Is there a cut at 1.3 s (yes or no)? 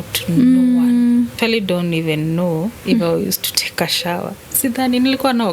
yes